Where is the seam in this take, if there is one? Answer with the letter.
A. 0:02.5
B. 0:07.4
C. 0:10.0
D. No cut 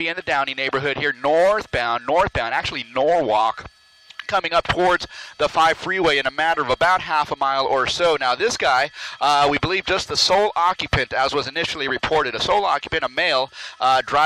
A